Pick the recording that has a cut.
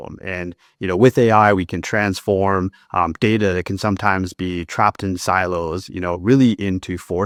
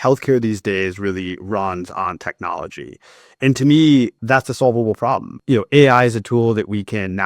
second; 2 cuts; at 4.2 s, 5.3 s

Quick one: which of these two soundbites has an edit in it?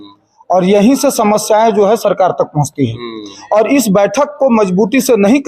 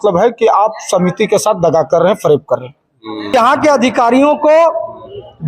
second; 1 cut; at 3.3 s

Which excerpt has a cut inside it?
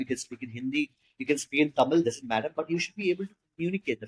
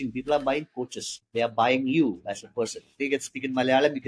second; 2 cuts; at 1.2 s, 3.0 s

